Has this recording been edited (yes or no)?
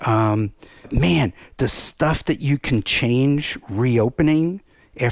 yes